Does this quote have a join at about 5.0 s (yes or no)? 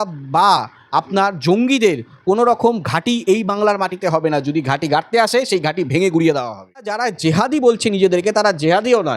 no